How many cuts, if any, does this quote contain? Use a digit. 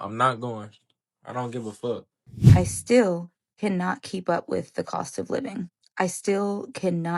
1